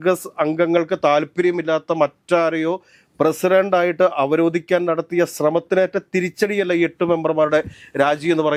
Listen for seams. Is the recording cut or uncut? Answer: uncut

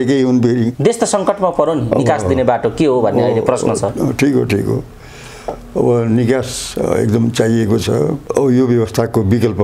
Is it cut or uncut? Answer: cut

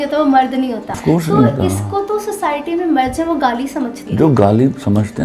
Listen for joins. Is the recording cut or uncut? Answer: cut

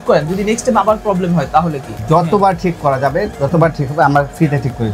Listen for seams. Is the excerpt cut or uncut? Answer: cut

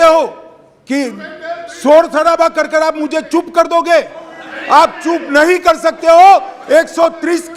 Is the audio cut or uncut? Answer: uncut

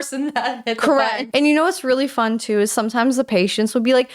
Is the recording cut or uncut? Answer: cut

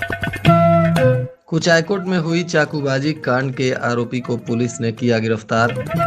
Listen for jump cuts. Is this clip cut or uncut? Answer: cut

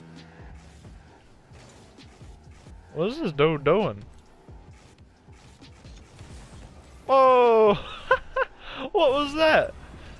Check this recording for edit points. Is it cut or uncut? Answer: uncut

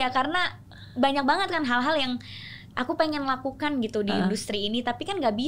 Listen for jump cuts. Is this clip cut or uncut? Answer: uncut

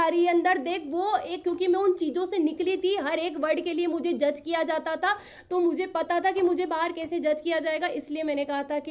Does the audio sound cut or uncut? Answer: uncut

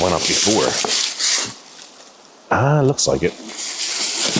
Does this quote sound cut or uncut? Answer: uncut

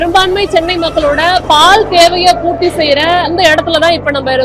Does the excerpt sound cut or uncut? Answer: cut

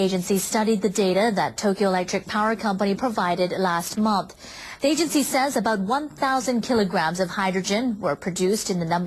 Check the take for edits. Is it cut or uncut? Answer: cut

